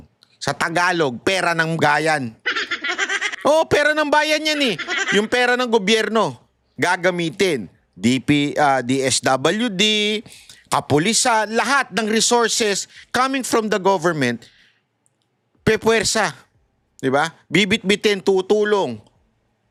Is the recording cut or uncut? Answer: uncut